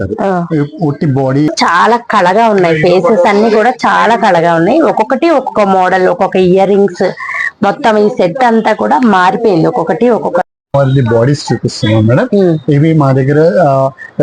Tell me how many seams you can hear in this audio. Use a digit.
2